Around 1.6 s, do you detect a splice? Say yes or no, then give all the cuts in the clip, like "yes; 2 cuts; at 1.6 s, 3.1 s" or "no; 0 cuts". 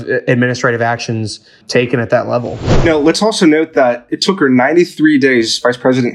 no; 1 cut; at 2.9 s